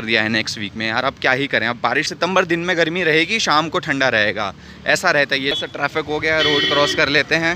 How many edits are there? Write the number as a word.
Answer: two